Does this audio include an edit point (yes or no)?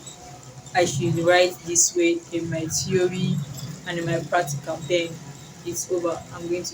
no